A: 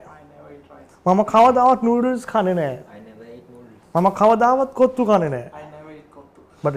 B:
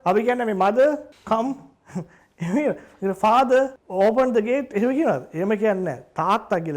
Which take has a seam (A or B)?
B